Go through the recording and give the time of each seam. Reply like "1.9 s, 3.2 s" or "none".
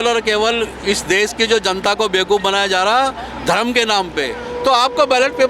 4.4 s